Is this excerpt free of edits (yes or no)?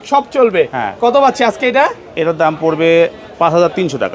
yes